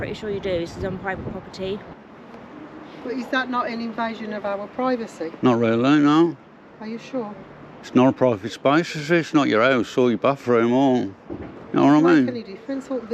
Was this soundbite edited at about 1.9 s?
yes; 1 cut; at 1.9 s

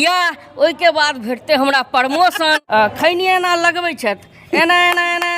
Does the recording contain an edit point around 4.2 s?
no; 1 cut; at 2.6 s

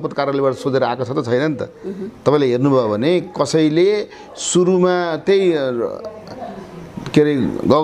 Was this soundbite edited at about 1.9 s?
no; 0 cuts

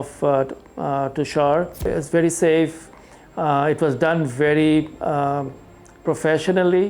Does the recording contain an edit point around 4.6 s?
no; 1 cut; at 1.9 s

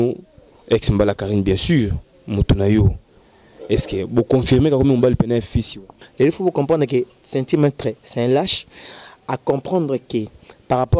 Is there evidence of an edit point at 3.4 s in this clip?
no; 1 cut; at 6.0 s

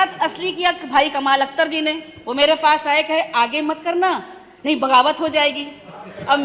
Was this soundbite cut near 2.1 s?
no; 0 cuts

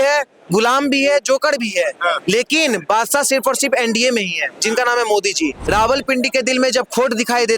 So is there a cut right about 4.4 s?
no; 1 cut; at 5.6 s

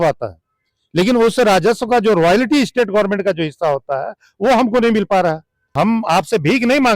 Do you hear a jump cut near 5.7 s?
yes; 1 cut; at 5.7 s

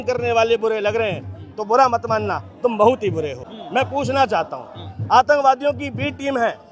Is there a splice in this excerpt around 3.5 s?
yes; 1 cut; at 3.5 s

